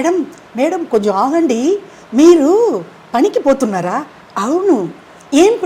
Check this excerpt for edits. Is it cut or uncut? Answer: uncut